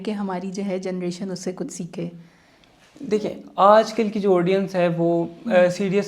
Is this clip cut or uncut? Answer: uncut